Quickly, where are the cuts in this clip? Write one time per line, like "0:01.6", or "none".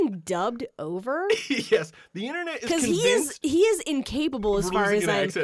none